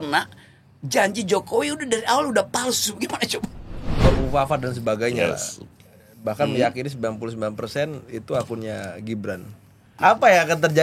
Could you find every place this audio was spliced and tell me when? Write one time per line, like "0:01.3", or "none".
0:04.1
0:09.8